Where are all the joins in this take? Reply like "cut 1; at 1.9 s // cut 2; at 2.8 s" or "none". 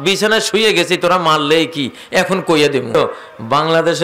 cut 1; at 2.9 s